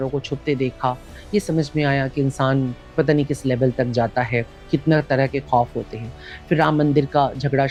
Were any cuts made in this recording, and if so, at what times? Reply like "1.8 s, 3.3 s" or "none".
none